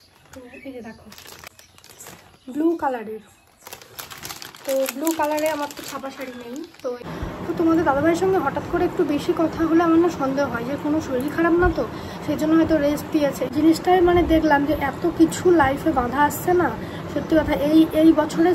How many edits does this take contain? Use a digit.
3